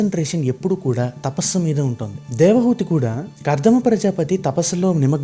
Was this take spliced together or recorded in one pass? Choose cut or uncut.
uncut